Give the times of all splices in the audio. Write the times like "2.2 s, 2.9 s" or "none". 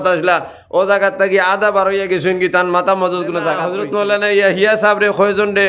3.7 s